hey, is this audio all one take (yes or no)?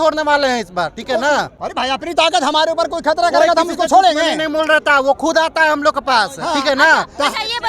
yes